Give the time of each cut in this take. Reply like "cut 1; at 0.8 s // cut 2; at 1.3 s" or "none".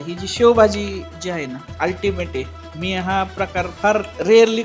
cut 1; at 1.6 s